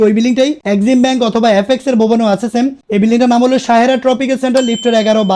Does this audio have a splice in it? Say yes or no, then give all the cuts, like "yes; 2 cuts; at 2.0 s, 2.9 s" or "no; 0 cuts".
no; 0 cuts